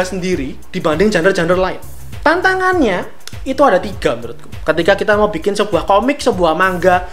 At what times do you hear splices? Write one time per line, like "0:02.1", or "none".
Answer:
none